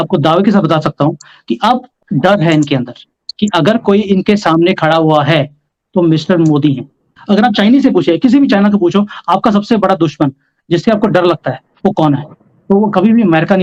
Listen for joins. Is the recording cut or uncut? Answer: uncut